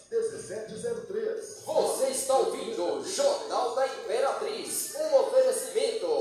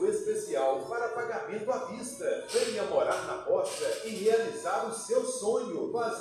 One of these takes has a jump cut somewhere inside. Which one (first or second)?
first